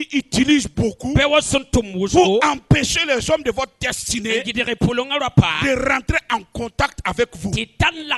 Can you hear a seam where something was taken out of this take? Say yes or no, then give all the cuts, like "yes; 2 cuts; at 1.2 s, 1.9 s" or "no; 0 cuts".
no; 0 cuts